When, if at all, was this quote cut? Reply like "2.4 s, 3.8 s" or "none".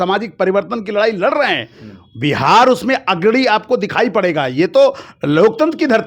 none

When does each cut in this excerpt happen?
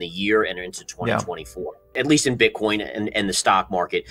1.8 s

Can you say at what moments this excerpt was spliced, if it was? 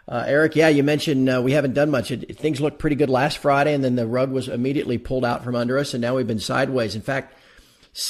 6.1 s

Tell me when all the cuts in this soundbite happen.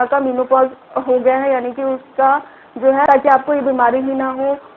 3.1 s

